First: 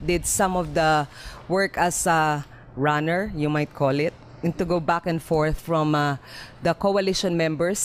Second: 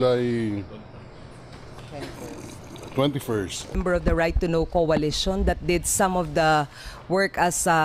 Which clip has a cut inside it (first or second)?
second